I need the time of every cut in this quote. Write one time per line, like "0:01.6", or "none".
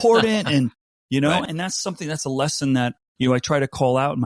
0:01.4
0:03.0